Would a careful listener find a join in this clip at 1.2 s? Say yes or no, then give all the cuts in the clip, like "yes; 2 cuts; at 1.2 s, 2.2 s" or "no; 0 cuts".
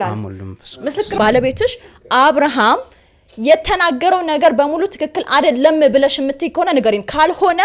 yes; 1 cut; at 1.2 s